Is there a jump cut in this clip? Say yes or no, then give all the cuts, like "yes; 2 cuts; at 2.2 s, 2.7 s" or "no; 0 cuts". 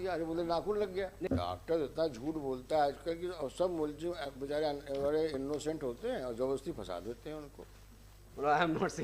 yes; 1 cut; at 1.3 s